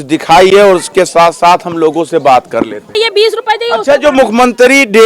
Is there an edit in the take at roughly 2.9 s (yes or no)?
yes